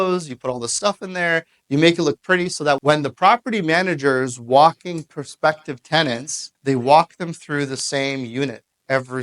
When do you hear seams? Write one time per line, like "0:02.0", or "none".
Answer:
0:02.8